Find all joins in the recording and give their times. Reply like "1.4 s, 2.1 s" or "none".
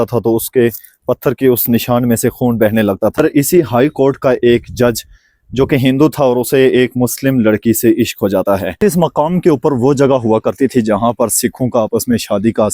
3.2 s, 8.8 s